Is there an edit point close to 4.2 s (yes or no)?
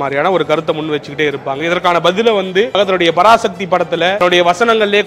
yes